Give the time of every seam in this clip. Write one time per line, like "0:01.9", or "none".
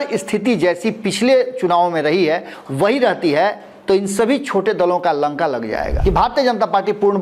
0:05.9